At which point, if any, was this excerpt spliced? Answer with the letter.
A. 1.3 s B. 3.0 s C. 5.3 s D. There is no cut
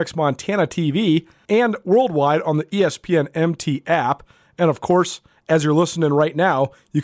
A